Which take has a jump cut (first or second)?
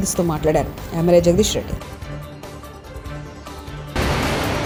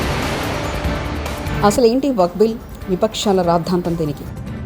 second